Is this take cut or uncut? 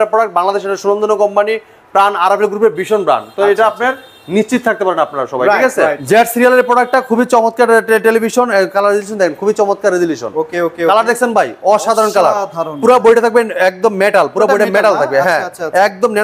cut